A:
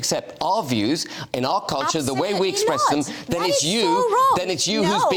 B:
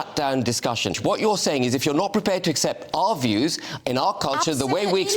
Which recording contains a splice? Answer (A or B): B